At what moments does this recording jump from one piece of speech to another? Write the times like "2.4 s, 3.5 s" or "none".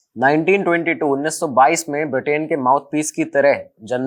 none